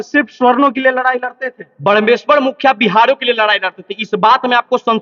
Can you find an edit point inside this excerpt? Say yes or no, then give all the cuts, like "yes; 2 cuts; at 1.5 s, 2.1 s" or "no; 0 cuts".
no; 0 cuts